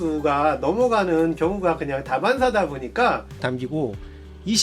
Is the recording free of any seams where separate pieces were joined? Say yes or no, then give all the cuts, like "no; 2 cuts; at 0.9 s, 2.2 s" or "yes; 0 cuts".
no; 1 cut; at 3.4 s